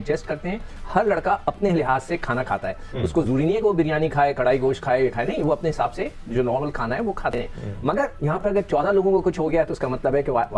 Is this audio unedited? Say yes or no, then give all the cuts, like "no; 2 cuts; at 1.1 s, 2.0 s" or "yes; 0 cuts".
yes; 0 cuts